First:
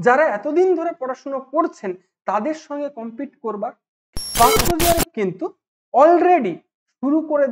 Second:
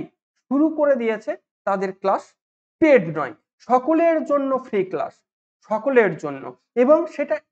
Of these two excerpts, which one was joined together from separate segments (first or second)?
first